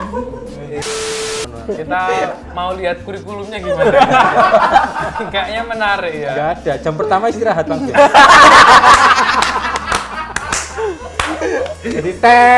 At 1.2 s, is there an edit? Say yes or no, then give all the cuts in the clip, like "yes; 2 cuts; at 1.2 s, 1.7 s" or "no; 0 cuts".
yes; 1 cut; at 1.2 s